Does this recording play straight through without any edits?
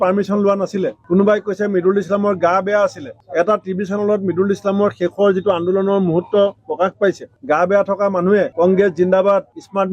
yes; 0 cuts

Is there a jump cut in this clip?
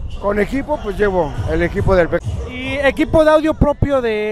yes; 1 cut; at 2.2 s

